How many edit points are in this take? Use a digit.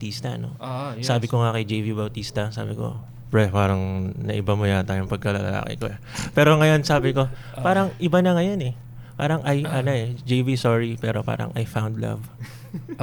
0